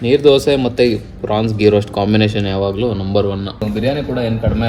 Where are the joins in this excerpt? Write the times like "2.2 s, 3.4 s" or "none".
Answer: 3.6 s